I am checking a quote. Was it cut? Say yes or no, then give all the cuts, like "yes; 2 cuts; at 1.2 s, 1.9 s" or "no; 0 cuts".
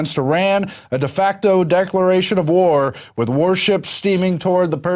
no; 0 cuts